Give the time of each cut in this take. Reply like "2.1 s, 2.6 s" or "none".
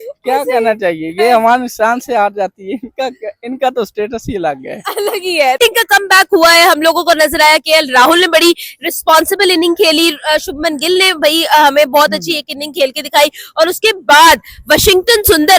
none